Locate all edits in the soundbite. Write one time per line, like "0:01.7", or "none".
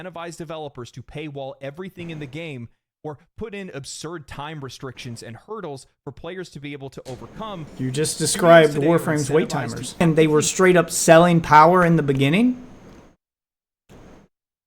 0:07.7
0:10.0